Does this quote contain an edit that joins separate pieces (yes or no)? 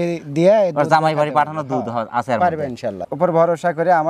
yes